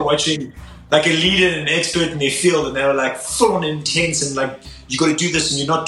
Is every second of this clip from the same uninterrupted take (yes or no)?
yes